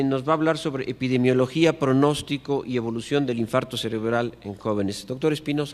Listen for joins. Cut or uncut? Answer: uncut